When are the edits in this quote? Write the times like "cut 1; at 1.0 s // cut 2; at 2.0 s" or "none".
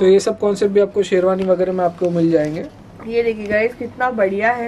none